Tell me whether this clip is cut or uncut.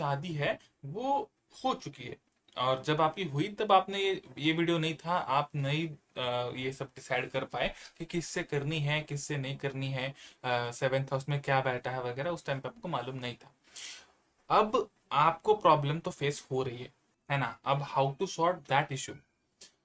uncut